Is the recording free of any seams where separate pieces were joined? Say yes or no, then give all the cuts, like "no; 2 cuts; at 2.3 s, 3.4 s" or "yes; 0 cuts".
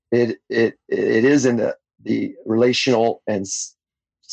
yes; 0 cuts